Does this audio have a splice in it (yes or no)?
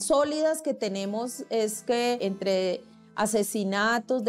yes